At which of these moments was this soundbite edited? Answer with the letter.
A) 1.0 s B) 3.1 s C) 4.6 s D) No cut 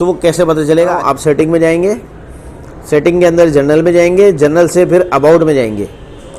A